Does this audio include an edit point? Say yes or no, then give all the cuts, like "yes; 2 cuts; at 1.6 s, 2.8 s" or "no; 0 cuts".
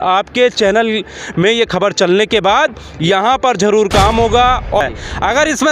yes; 1 cut; at 4.8 s